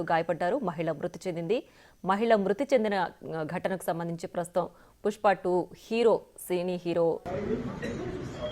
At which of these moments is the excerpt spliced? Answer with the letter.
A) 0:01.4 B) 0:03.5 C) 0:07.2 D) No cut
C